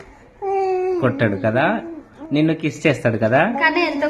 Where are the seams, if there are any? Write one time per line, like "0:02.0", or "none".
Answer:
none

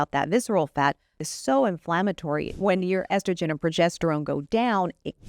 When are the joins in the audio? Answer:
0:01.2
0:02.5

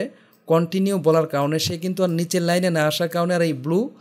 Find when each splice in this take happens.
none

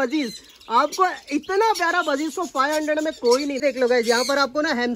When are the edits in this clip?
0:03.6

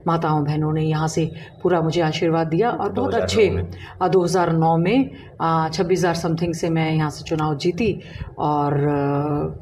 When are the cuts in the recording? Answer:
none

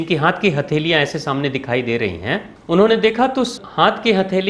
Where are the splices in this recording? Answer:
0:02.5
0:03.5

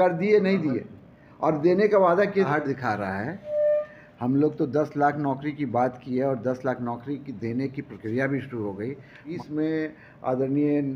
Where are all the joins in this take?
0:02.5
0:09.3

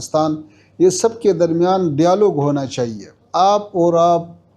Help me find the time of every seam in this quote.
0:03.2

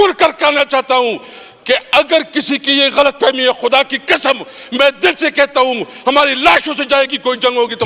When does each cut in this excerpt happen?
none

